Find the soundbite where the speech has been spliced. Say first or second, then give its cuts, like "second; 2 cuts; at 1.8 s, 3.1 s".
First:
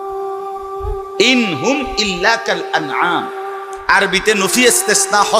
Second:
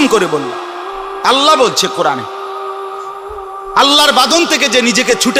first; 1 cut; at 1.1 s